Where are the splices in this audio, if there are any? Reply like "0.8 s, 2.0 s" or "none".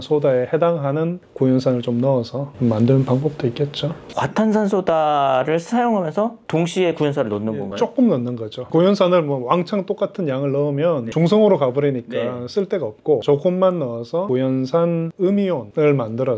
none